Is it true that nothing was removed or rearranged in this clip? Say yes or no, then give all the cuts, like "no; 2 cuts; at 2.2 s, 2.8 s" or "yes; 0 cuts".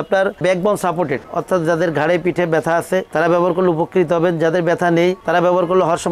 yes; 0 cuts